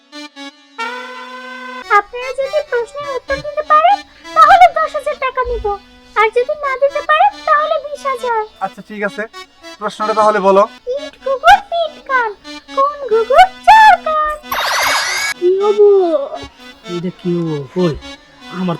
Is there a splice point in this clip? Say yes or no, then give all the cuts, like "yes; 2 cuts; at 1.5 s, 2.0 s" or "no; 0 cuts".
yes; 3 cuts; at 1.7 s, 10.8 s, 15.3 s